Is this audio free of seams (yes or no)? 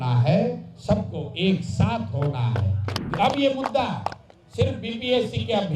no